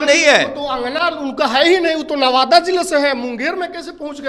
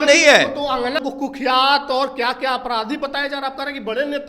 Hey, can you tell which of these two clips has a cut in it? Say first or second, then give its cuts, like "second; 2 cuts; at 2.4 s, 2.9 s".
second; 1 cut; at 1.0 s